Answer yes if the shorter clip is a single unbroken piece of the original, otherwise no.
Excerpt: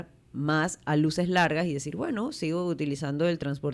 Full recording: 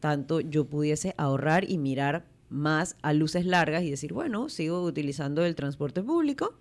yes